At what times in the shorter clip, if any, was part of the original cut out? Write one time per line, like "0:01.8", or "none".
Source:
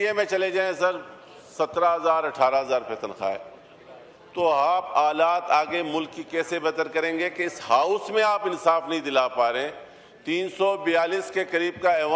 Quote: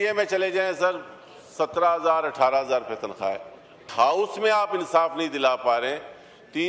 0:03.8